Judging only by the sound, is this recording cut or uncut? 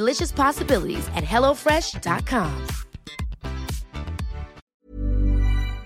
cut